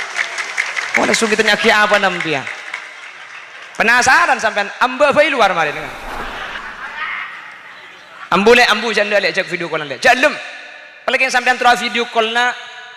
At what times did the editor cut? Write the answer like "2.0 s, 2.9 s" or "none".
6.6 s